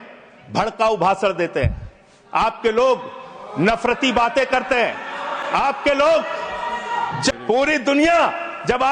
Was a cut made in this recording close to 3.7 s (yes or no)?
no